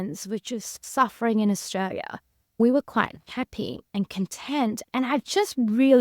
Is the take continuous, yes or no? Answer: no